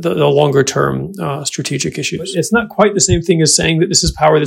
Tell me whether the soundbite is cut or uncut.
cut